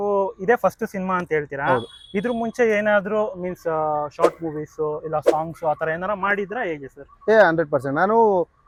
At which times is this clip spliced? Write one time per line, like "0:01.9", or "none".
none